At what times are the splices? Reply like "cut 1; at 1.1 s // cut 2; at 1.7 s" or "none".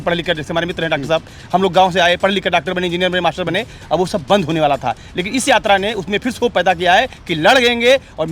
none

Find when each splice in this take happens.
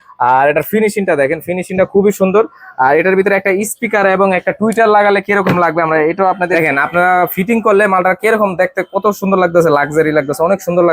cut 1; at 6.5 s

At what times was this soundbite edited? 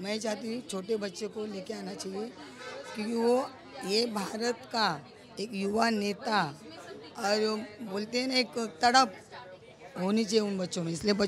none

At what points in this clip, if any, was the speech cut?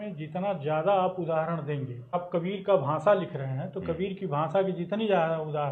cut 1; at 2.1 s

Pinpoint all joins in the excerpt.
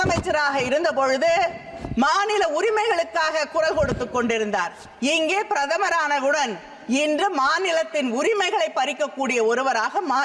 none

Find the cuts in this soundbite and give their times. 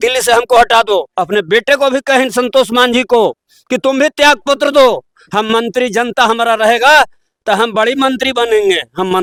none

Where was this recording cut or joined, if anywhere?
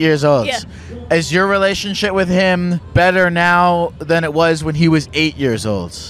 cut 1; at 2.8 s

